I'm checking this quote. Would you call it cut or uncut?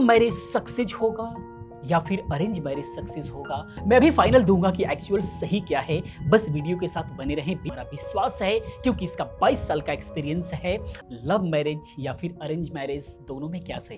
cut